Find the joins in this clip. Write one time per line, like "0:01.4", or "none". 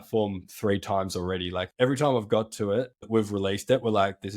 0:01.7
0:03.0